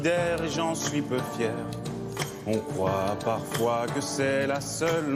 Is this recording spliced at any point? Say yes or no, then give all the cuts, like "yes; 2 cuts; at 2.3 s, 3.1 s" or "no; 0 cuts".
no; 0 cuts